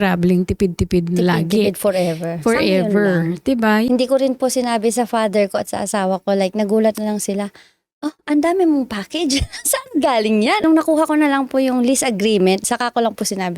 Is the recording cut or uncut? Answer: cut